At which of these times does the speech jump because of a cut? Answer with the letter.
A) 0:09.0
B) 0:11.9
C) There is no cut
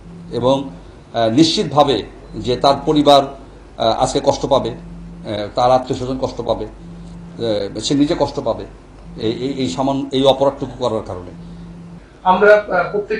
B